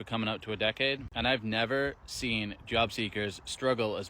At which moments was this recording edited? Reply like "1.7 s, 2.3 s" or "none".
1.1 s